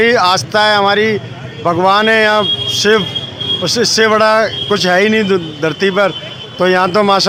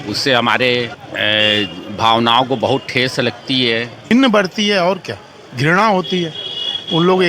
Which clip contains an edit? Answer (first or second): second